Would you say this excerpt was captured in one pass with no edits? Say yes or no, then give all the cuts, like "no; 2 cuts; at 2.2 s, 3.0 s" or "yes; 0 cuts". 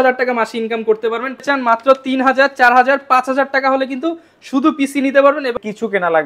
no; 2 cuts; at 1.4 s, 5.5 s